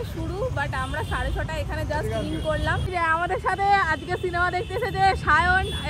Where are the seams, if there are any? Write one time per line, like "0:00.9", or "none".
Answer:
0:02.9